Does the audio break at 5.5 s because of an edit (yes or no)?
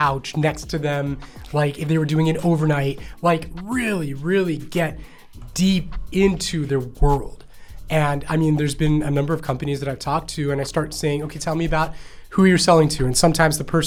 no